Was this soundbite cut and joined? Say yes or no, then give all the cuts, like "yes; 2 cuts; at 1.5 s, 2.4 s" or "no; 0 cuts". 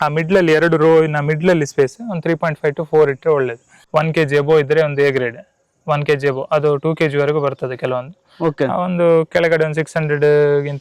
yes; 1 cut; at 3.7 s